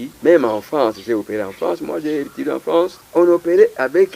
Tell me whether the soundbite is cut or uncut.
cut